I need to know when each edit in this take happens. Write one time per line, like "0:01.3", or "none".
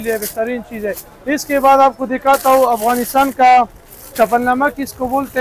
none